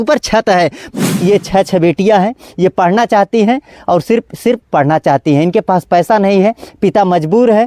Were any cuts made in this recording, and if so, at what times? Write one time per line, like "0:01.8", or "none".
0:00.9